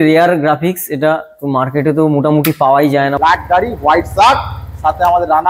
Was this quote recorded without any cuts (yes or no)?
no